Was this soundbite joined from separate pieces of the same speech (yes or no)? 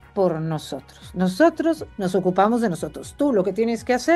no